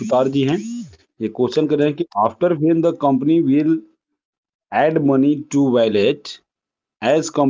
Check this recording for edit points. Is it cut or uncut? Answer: uncut